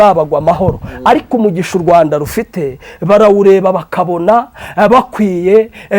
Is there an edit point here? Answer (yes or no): no